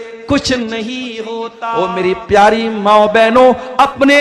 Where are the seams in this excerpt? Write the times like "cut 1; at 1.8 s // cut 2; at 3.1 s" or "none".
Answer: cut 1; at 1.6 s